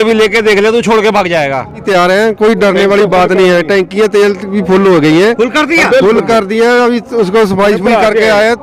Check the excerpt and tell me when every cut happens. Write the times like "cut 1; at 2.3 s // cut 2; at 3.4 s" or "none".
cut 1; at 1.8 s